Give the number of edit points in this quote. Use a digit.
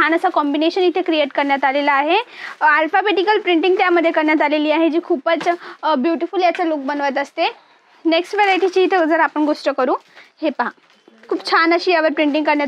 0